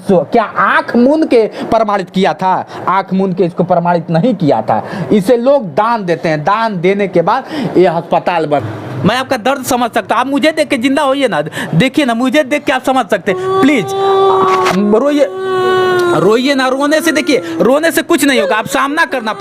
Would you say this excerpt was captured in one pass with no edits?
no; 1 cut; at 8.6 s

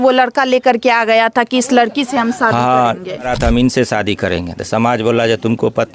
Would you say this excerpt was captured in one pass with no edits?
no; 1 cut; at 3.3 s

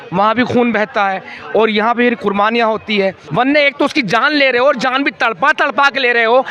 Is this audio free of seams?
no; 1 cut; at 3.2 s

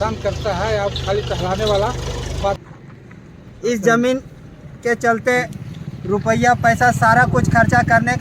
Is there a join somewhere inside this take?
yes; 1 cut; at 2.7 s

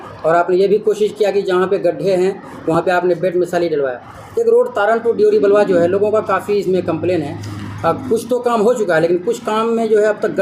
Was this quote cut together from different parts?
no; 0 cuts

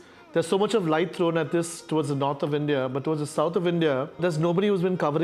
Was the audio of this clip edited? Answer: no; 0 cuts

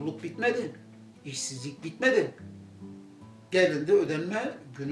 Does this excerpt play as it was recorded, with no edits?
yes; 0 cuts

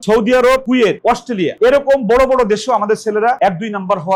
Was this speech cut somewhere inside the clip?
no; 0 cuts

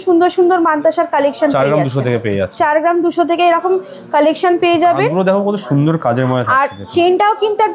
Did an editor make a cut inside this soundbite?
no; 0 cuts

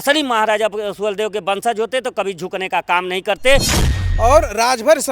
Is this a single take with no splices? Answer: no; 1 cut; at 3.8 s

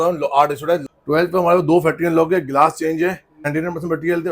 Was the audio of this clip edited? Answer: yes; 2 cuts; at 0.9 s, 3.5 s

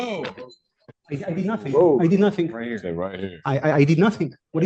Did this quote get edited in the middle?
no; 0 cuts

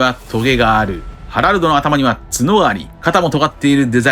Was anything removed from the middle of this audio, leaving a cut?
yes; 1 cut; at 1.1 s

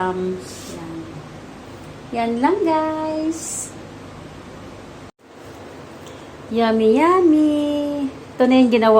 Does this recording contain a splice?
yes; 1 cut; at 5.2 s

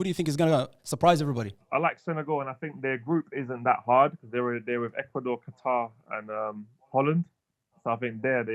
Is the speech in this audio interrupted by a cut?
yes; 1 cut; at 1.6 s

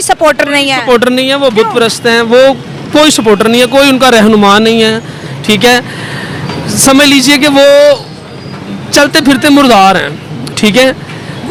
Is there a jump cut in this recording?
no; 0 cuts

